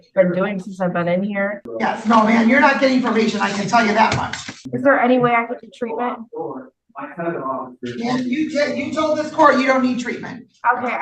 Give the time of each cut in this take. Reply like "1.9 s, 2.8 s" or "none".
1.5 s, 4.6 s

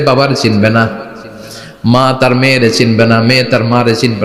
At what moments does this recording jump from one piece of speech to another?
none

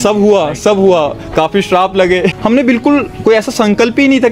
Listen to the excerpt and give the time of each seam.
2.3 s

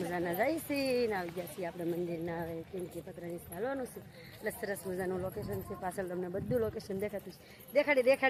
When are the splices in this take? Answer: none

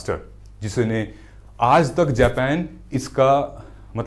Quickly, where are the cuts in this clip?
none

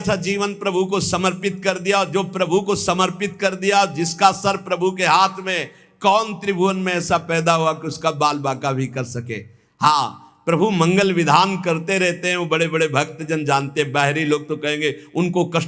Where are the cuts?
none

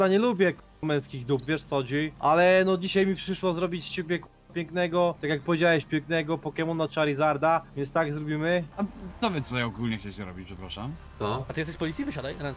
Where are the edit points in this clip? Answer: 2.1 s, 8.7 s

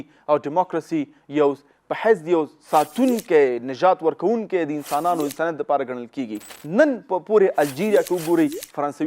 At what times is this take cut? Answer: 6.5 s

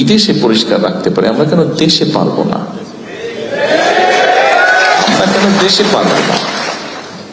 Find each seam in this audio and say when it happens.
none

